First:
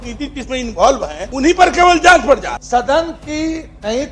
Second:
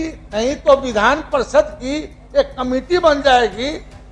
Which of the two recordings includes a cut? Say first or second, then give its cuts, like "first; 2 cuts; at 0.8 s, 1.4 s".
first; 2 cuts; at 1.2 s, 2.5 s